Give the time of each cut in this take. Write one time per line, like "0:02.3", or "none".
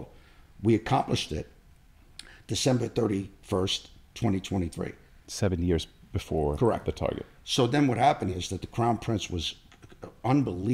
none